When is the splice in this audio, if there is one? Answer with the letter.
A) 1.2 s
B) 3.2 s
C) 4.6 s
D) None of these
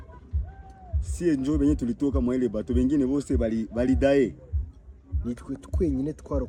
D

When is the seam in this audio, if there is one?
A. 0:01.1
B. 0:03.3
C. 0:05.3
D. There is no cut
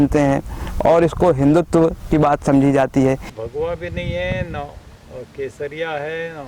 B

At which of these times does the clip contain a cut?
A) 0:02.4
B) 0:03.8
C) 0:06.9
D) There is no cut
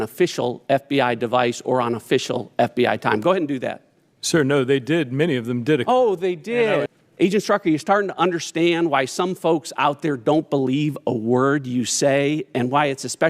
C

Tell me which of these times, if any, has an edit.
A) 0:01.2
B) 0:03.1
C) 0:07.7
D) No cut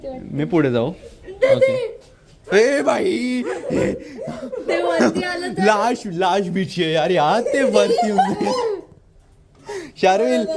D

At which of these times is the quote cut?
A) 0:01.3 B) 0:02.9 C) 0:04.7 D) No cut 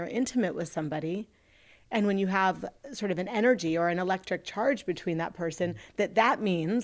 D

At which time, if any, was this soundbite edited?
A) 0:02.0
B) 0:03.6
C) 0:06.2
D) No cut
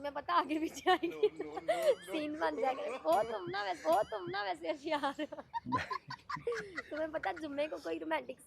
D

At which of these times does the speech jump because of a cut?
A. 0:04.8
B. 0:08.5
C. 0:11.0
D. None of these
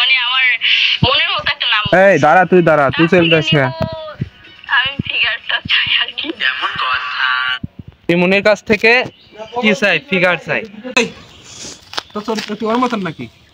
C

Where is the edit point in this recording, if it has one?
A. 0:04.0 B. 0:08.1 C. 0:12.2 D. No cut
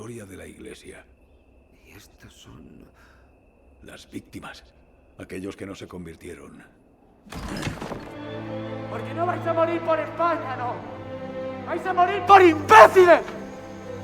B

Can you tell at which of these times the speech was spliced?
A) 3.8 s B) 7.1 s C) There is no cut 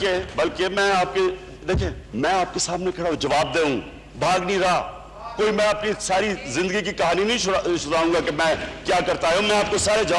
C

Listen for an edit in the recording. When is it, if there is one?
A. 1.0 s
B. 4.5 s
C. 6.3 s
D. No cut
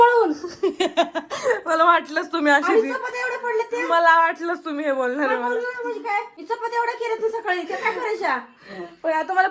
C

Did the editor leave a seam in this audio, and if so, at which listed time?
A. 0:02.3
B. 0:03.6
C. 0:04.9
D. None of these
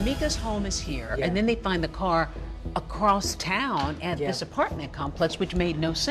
D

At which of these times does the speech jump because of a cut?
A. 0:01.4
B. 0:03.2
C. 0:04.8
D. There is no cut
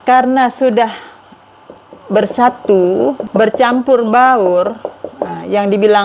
B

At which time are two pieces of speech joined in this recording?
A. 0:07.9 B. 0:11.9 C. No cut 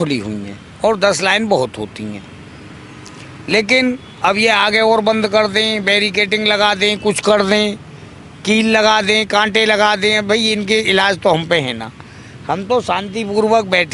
C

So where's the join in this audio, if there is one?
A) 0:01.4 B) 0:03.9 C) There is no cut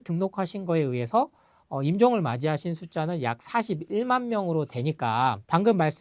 C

